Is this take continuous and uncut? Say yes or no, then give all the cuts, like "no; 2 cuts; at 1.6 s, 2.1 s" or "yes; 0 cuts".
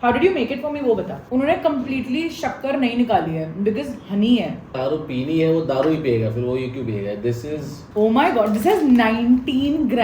no; 3 cuts; at 1.1 s, 4.6 s, 7.8 s